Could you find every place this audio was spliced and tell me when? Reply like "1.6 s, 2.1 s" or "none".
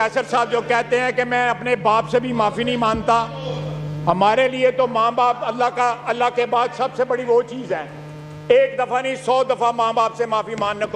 none